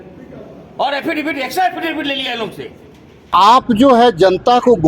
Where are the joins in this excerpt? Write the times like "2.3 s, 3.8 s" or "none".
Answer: 3.5 s